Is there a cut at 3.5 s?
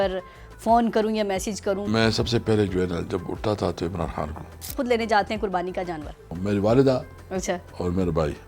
no; 3 cuts; at 1.9 s, 4.7 s, 6.3 s

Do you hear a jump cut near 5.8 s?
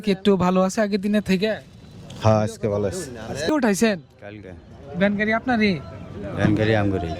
no; 1 cut; at 3.5 s

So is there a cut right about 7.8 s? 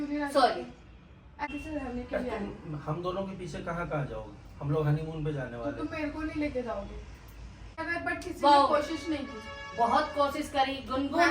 yes; 2 cuts; at 1.5 s, 7.8 s

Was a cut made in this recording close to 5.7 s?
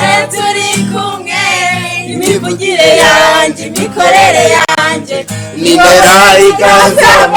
no; 0 cuts

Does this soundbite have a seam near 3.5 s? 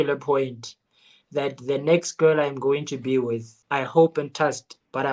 yes; 1 cut; at 3.5 s

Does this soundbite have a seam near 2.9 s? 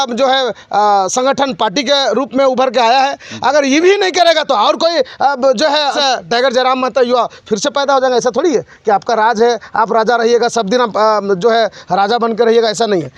no; 1 cut; at 6.0 s

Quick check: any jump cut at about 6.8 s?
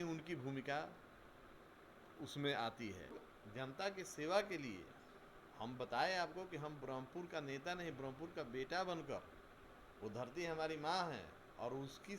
no; 1 cut; at 3.2 s

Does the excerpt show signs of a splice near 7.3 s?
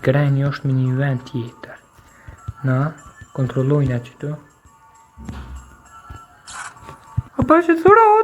yes; 1 cut; at 7.3 s

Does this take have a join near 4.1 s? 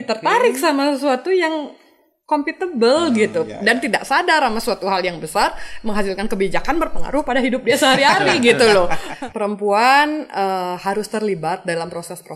no; 1 cut; at 9.0 s

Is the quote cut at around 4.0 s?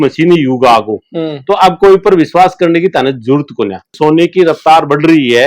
yes; 1 cut; at 4.0 s

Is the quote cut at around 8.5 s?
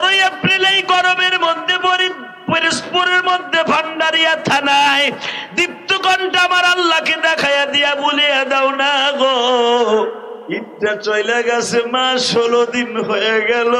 no; 1 cut; at 10.3 s

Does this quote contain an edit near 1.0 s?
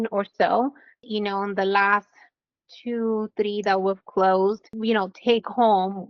yes; 2 cuts; at 1.0 s, 4.7 s

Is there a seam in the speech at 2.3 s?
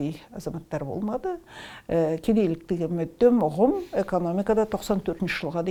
no; 0 cuts

